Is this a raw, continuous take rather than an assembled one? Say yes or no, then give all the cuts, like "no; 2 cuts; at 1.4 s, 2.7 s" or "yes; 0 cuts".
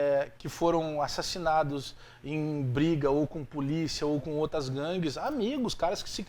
yes; 0 cuts